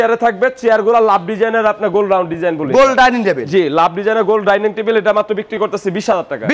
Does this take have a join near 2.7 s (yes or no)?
no